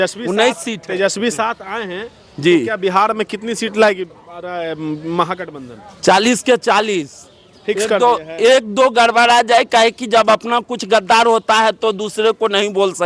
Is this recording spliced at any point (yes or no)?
no